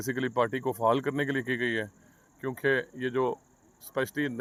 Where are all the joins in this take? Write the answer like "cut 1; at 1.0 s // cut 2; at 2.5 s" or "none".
none

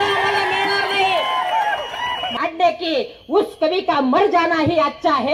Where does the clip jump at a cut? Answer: cut 1; at 2.4 s

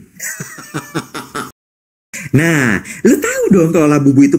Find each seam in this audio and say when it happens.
cut 1; at 2.0 s

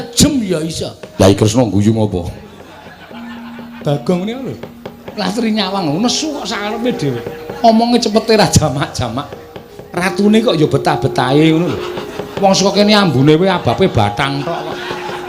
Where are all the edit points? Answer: cut 1; at 1.1 s

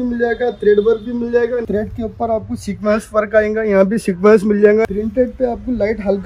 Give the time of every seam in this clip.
cut 1; at 1.6 s // cut 2; at 4.8 s

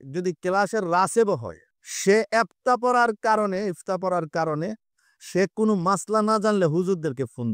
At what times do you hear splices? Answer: none

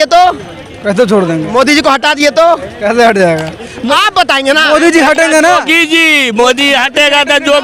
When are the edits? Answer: none

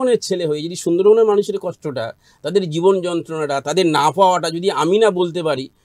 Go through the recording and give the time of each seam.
none

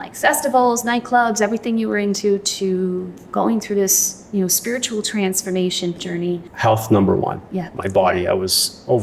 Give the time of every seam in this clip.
cut 1; at 6.0 s // cut 2; at 7.7 s

